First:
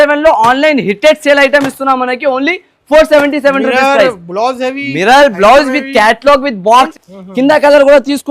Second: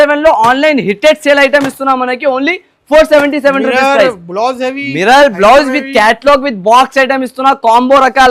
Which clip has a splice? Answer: first; 1 cut; at 6.9 s

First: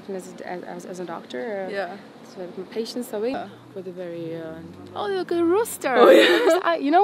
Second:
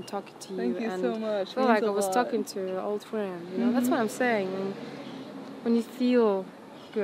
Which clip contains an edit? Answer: first; 1 cut; at 3.3 s

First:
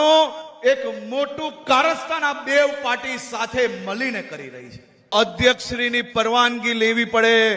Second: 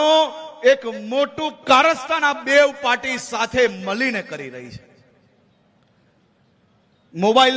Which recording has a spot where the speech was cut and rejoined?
first; 1 cut; at 5.1 s

